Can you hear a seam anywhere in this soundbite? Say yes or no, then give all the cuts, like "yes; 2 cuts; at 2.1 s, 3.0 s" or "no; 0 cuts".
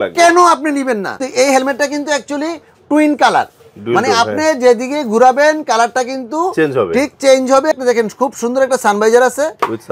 yes; 2 cuts; at 1.2 s, 7.7 s